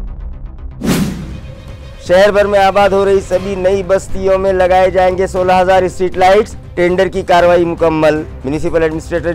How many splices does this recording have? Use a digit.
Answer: 0